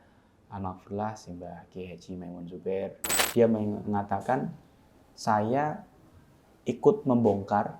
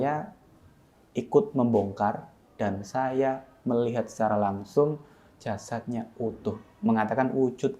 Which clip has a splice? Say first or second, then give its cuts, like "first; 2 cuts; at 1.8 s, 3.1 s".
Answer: first; 1 cut; at 3.2 s